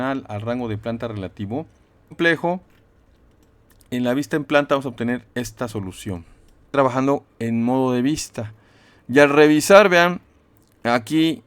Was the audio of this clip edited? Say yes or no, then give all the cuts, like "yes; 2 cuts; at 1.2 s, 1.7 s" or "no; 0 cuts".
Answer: yes; 2 cuts; at 2.1 s, 6.7 s